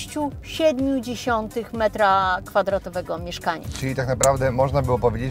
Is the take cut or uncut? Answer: cut